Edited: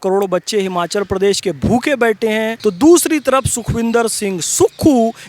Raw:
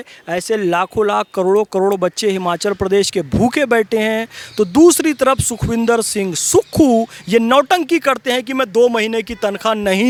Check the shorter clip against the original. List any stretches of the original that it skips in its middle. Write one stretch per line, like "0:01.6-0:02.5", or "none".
0:04.2-0:04.5